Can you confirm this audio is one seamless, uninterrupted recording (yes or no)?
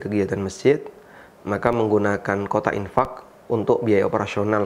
yes